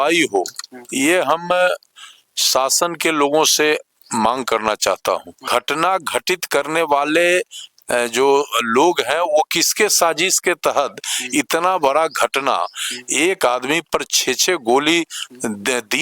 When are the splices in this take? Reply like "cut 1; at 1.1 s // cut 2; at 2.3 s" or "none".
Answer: cut 1; at 5.4 s

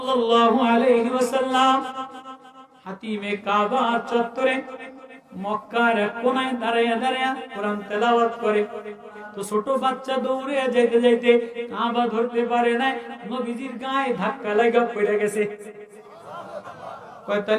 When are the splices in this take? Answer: cut 1; at 9.3 s // cut 2; at 13.2 s // cut 3; at 16.7 s

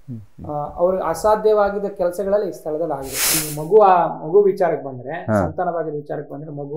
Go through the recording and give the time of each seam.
cut 1; at 3.4 s

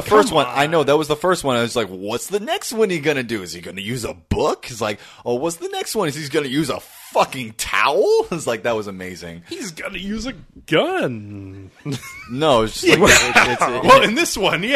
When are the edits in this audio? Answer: none

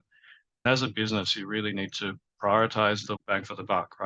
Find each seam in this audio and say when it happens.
cut 1; at 3.1 s

